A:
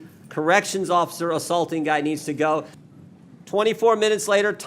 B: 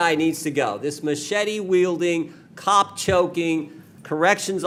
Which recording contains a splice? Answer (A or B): A